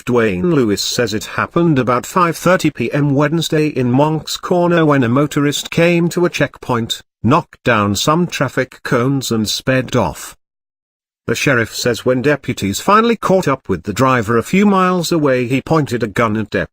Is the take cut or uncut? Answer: cut